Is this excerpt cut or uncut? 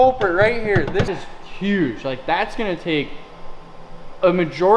cut